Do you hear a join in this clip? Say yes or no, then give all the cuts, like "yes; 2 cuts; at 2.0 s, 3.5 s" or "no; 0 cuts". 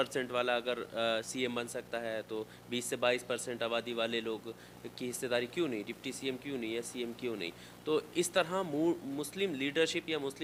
no; 0 cuts